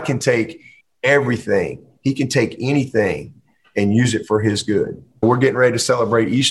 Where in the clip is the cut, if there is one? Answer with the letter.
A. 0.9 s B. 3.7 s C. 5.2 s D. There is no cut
C